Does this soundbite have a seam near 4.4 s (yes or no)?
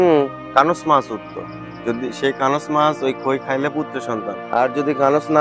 yes